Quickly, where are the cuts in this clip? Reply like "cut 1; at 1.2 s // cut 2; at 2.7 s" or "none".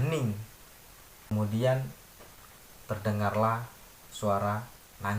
cut 1; at 1.3 s